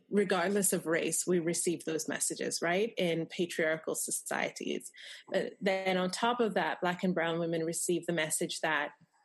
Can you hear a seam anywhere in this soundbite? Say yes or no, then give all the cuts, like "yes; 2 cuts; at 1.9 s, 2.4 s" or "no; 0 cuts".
no; 0 cuts